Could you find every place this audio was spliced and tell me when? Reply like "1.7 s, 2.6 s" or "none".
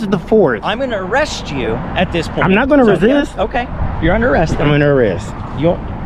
none